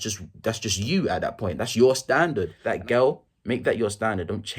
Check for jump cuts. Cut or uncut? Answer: cut